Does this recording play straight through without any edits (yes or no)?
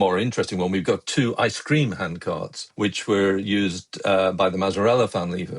no